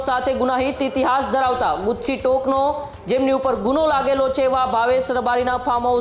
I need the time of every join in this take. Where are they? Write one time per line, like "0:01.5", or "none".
none